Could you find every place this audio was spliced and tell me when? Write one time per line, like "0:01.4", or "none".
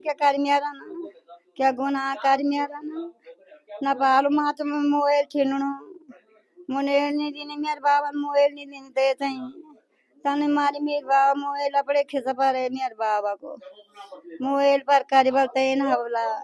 none